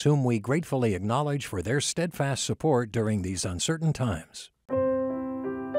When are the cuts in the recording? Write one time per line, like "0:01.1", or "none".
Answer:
0:04.6